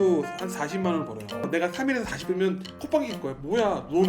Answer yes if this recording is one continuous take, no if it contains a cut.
no